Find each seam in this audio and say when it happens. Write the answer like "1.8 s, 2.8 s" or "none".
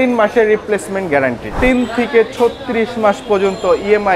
1.5 s